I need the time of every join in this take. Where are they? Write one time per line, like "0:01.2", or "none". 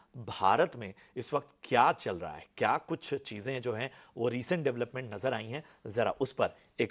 none